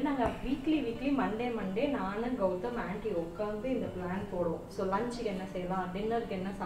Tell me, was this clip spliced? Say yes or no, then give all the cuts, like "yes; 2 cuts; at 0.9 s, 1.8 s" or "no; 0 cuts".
no; 0 cuts